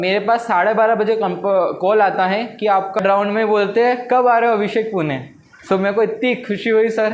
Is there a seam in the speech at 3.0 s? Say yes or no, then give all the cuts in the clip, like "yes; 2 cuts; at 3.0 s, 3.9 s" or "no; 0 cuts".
yes; 1 cut; at 3.0 s